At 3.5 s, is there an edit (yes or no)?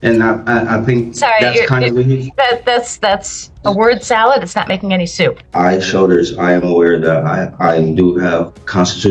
no